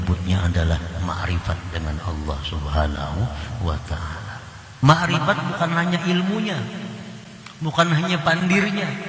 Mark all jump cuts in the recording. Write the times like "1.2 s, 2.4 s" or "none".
4.7 s